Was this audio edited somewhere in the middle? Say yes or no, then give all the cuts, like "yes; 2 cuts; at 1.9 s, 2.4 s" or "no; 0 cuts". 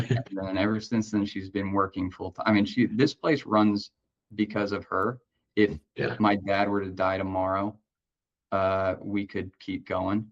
no; 0 cuts